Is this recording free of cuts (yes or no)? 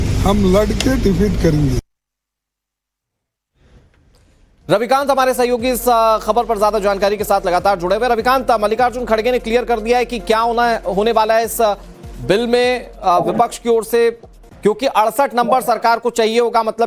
yes